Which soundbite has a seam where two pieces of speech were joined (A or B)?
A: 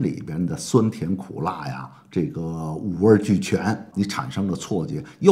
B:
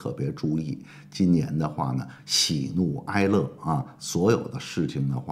A